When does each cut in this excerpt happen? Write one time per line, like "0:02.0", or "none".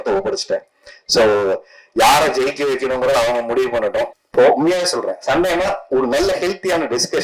0:04.2